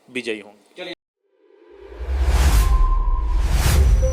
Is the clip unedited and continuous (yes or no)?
no